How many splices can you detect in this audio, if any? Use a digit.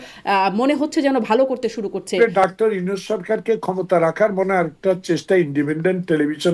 1